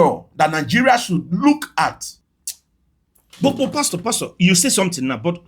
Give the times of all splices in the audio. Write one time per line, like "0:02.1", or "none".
0:02.1